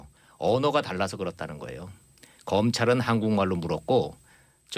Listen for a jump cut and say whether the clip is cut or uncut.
uncut